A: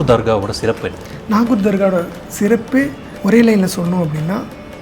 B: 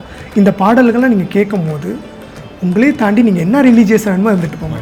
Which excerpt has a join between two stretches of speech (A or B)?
A